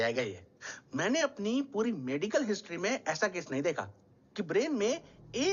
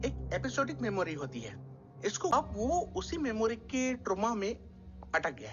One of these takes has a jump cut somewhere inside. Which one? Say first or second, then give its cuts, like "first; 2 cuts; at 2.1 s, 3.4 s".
second; 1 cut; at 2.3 s